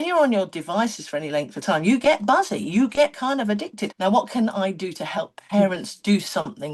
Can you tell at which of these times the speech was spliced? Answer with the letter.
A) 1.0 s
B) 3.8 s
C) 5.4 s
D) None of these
B